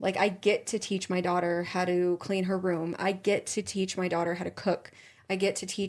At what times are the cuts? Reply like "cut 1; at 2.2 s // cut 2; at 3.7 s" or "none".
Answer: none